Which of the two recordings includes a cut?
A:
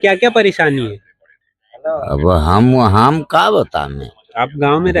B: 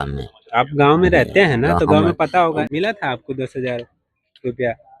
B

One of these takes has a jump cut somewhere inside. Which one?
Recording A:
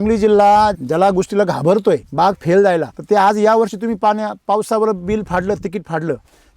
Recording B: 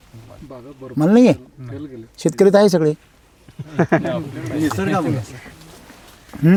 A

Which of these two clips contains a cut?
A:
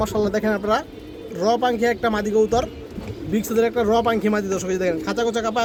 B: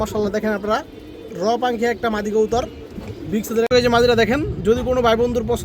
B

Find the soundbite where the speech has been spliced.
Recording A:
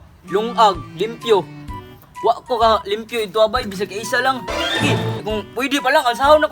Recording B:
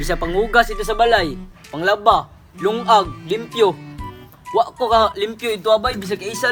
A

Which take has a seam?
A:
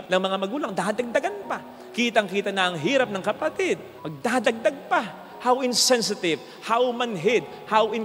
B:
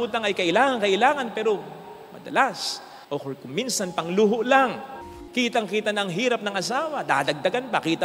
B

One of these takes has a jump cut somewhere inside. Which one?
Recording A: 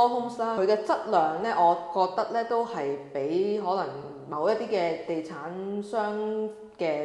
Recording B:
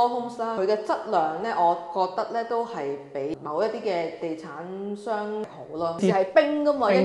B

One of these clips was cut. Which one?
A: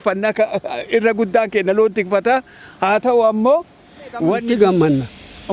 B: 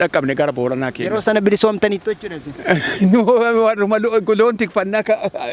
A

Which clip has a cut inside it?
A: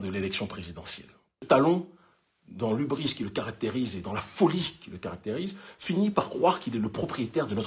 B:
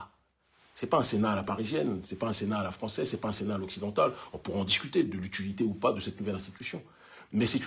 A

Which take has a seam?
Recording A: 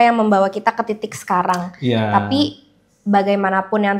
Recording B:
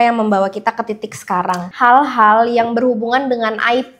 B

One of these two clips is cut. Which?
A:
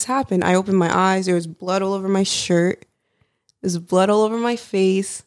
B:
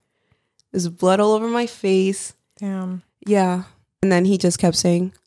B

